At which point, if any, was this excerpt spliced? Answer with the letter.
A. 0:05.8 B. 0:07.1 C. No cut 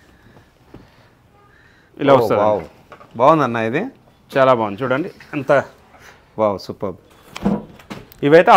B